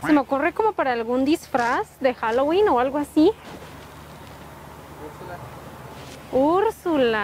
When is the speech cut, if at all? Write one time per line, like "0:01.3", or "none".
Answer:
none